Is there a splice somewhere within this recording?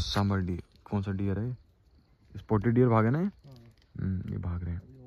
no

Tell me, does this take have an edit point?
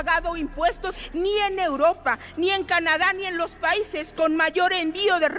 yes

